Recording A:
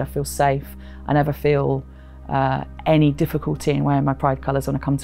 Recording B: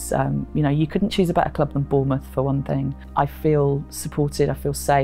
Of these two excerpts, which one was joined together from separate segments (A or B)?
B